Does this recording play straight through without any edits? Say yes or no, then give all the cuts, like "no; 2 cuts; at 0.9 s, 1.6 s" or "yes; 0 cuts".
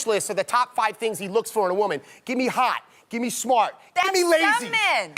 yes; 0 cuts